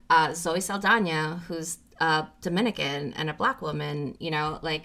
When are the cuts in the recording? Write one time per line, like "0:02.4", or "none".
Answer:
none